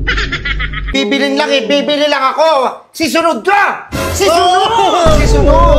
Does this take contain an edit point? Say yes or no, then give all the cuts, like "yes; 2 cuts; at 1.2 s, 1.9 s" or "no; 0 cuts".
yes; 1 cut; at 0.9 s